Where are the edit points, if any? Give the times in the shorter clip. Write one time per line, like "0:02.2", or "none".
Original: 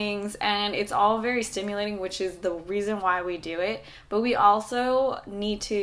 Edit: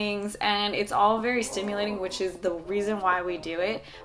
none